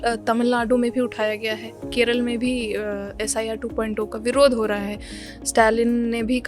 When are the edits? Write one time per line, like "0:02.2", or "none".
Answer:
none

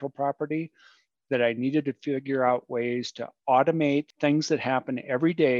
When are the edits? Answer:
0:04.1

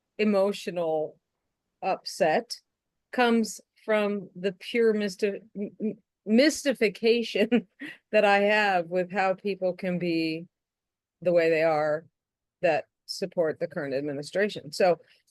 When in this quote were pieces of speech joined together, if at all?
none

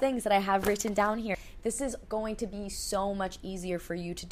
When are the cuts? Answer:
0:01.4

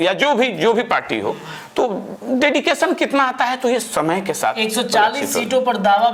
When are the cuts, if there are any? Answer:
none

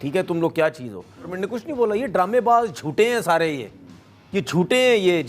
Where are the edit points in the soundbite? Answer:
0:01.3

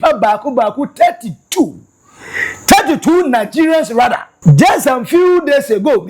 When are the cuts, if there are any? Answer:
0:04.3

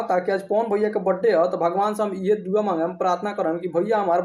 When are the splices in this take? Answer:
none

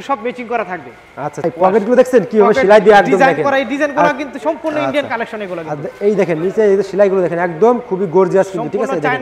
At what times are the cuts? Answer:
0:01.5

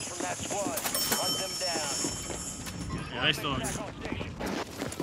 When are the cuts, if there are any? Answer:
none

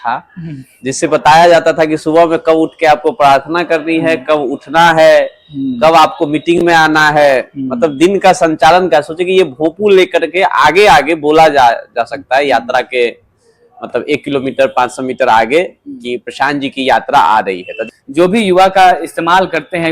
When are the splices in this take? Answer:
0:17.8

